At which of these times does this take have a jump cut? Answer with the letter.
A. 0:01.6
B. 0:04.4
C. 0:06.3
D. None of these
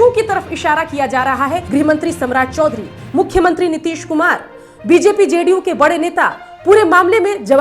A